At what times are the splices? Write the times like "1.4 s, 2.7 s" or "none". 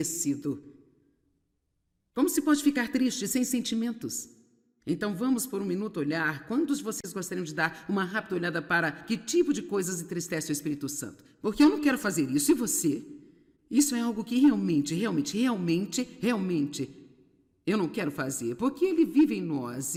none